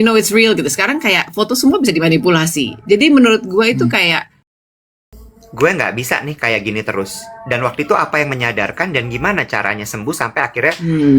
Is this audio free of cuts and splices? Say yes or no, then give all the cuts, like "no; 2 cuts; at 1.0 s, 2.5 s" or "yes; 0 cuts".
no; 1 cut; at 4.5 s